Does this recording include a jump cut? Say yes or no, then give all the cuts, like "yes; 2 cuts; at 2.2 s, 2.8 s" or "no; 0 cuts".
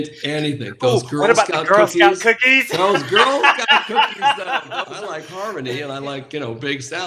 yes; 1 cut; at 5.0 s